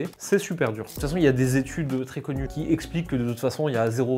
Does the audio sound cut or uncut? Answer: cut